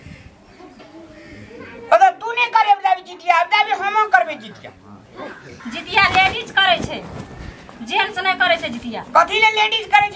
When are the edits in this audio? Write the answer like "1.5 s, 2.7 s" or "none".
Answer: 5.6 s